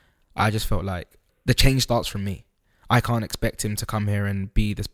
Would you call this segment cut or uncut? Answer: cut